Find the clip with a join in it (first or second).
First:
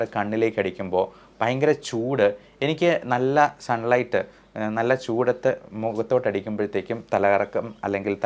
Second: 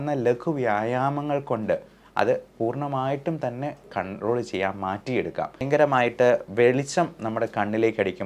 second